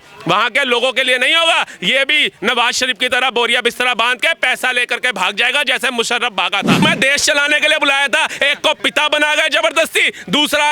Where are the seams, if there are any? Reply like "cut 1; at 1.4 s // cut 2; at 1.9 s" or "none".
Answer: cut 1; at 6.8 s